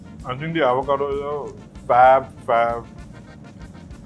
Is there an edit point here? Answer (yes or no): no